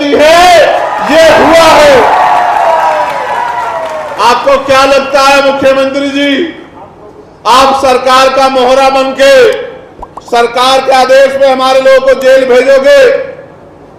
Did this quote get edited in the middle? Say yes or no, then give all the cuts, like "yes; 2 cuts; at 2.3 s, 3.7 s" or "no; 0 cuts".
no; 0 cuts